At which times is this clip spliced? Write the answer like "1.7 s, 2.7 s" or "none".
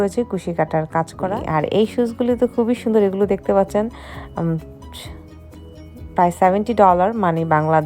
1.4 s, 4.6 s, 6.2 s